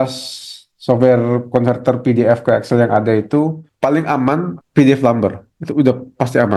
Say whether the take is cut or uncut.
cut